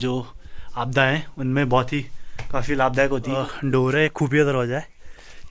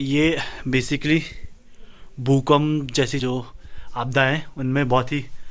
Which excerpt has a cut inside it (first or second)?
first